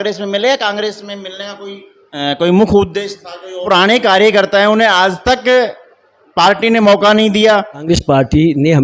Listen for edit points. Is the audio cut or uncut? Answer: cut